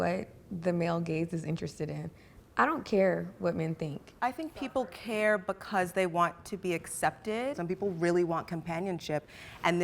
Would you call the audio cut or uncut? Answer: cut